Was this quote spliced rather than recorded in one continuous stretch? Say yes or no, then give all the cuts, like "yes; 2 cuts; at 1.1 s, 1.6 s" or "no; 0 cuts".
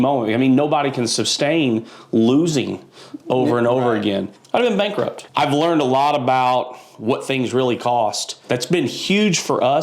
yes; 3 cuts; at 4.3 s, 5.2 s, 8.4 s